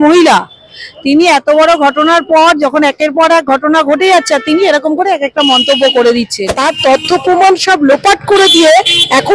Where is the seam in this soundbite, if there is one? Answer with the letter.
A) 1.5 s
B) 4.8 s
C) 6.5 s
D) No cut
C